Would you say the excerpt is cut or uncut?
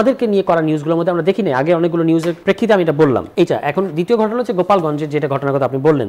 cut